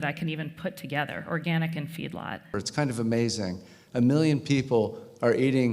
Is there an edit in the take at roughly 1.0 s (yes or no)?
no